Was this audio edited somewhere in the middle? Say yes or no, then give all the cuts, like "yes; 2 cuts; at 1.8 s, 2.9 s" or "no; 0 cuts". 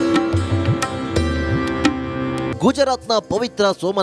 yes; 1 cut; at 2.5 s